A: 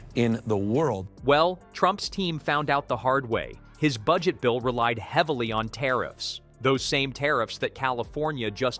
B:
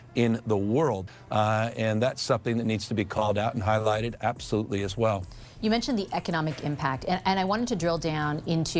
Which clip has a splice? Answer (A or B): B